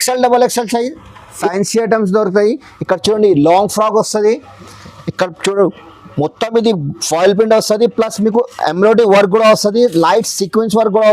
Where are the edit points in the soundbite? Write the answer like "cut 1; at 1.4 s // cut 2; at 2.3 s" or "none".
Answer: cut 1; at 1.4 s